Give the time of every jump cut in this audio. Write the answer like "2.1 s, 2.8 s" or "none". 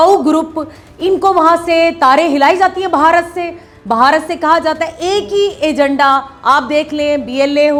none